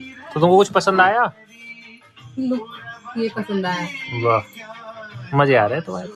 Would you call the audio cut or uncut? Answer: uncut